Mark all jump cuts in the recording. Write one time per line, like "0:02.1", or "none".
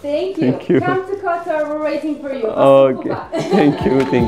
none